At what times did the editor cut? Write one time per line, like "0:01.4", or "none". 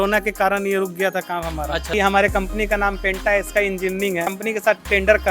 0:01.9
0:04.4